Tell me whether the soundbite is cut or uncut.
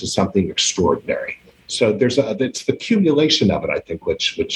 uncut